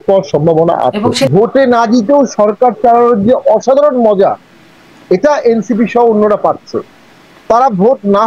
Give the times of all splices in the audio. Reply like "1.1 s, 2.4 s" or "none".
1.2 s